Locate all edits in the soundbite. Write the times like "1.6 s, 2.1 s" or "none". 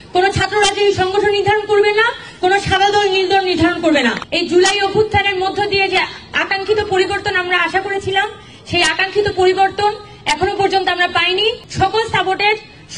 4.2 s, 11.7 s